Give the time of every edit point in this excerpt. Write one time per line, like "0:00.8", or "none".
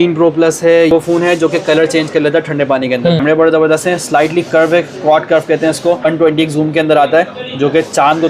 0:00.9
0:03.2
0:06.0